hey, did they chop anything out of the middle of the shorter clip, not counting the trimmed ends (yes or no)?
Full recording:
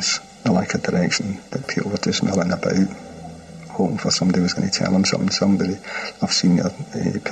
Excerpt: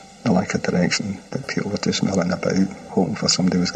yes